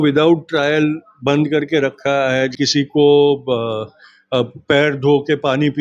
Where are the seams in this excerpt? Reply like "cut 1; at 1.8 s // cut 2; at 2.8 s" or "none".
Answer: cut 1; at 2.5 s

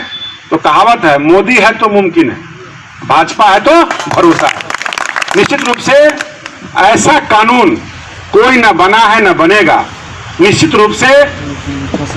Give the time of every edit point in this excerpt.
none

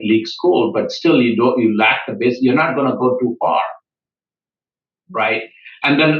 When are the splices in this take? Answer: none

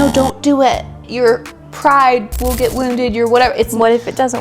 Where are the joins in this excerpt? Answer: cut 1; at 1.1 s

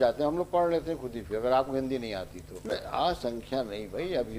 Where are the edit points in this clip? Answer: cut 1; at 2.7 s

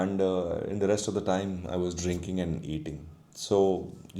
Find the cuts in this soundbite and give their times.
none

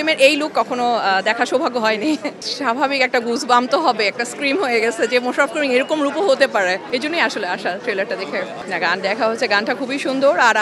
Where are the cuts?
none

